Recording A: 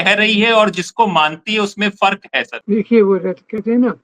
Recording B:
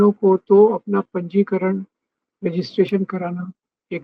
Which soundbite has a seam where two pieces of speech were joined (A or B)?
A